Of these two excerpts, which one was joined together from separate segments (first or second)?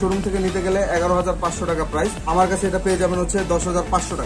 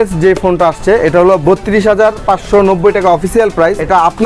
first